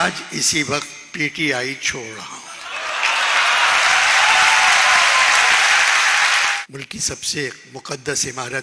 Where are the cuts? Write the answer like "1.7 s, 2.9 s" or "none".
6.6 s